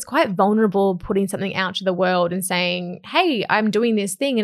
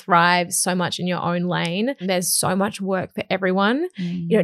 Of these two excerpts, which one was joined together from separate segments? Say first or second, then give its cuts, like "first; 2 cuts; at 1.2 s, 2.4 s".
second; 1 cut; at 2.0 s